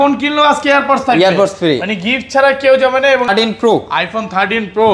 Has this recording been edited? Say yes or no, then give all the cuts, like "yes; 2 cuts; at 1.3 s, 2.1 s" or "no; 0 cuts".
yes; 1 cut; at 3.3 s